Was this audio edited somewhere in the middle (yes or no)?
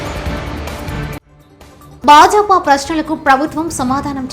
yes